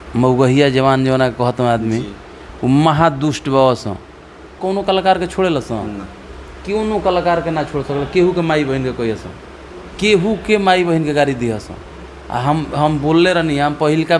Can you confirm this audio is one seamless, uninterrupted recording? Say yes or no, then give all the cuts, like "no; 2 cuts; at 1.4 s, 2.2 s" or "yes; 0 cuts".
no; 1 cut; at 4.6 s